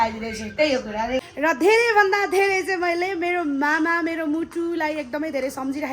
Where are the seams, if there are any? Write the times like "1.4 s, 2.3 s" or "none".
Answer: 1.2 s